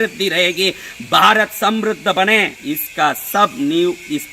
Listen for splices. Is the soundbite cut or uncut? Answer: cut